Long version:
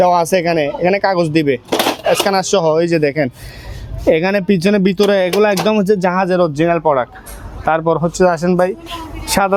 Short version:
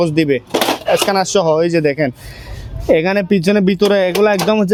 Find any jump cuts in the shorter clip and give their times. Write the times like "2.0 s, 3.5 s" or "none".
none